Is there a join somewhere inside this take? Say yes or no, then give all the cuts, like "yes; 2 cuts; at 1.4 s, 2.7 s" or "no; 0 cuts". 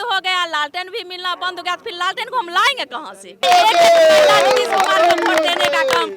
yes; 1 cut; at 3.4 s